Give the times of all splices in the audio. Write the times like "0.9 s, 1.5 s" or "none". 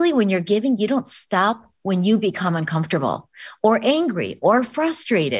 none